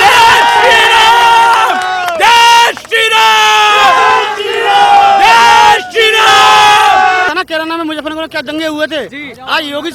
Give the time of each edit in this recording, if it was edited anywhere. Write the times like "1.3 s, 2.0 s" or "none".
7.3 s